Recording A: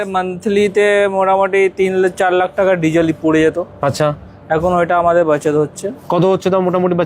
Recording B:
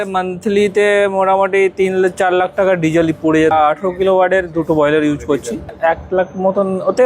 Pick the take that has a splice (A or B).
B